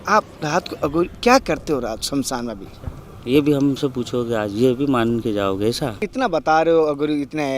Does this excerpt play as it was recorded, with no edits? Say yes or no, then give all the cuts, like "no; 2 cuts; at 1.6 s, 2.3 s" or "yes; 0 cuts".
no; 1 cut; at 6.1 s